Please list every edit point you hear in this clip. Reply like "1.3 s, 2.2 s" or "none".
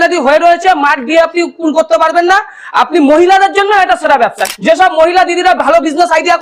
4.4 s

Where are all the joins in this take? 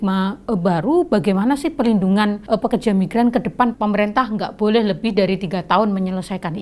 2.4 s, 3.7 s

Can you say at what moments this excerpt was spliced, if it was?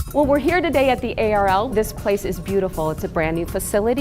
1.7 s

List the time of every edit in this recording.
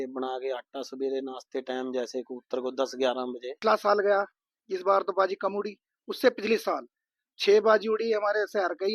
3.6 s

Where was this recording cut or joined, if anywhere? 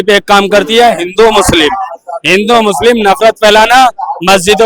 none

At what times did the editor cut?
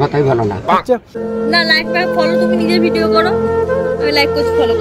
1.2 s

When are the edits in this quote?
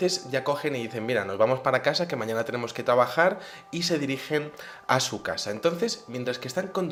none

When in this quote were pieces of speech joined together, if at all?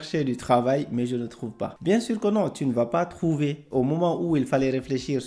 1.7 s

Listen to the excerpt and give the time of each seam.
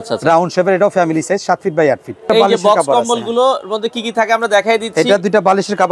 2.3 s

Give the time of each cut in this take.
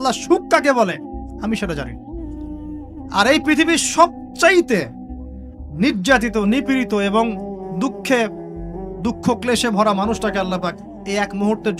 1.9 s, 3.1 s

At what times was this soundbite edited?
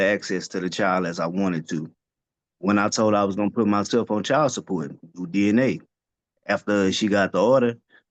none

